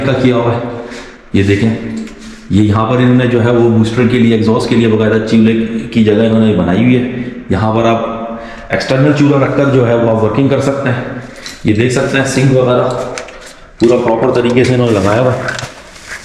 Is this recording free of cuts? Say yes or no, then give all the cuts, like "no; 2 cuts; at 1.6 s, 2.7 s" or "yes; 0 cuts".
yes; 0 cuts